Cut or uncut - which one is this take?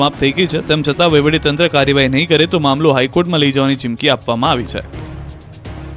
uncut